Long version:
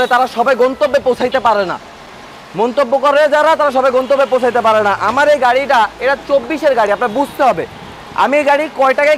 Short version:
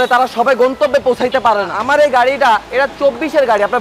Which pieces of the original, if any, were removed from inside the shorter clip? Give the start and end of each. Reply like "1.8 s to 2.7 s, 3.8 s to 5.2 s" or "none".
1.9 s to 5.1 s